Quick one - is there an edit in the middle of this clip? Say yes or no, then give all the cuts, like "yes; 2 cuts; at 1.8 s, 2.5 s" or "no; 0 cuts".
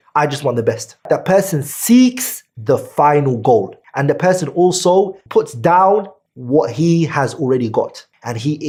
no; 0 cuts